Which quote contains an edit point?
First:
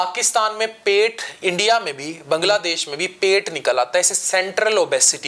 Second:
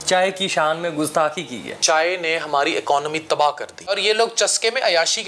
second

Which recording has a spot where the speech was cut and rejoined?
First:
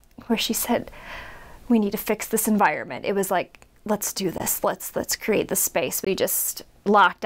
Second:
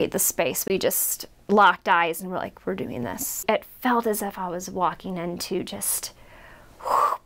second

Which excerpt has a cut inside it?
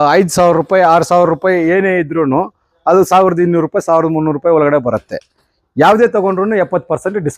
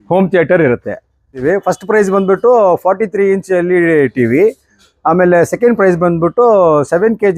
second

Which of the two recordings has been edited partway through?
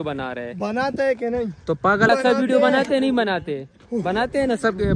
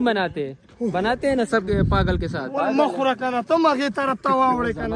first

